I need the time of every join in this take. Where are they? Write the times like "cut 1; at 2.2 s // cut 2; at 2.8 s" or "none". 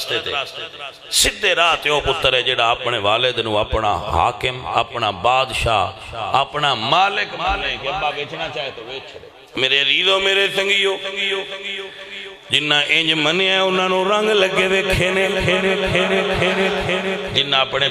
cut 1; at 9.4 s